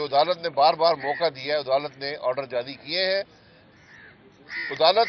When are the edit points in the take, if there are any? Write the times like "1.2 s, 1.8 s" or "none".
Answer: none